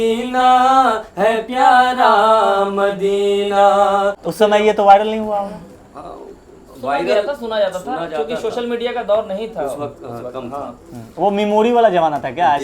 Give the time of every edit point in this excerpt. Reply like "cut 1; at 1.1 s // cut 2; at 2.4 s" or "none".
cut 1; at 4.2 s